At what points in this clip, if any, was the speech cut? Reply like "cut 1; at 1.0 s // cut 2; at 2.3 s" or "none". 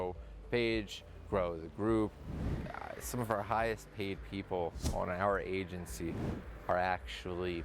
cut 1; at 2.5 s